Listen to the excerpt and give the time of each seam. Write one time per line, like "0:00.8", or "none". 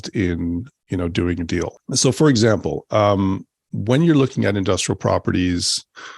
0:01.8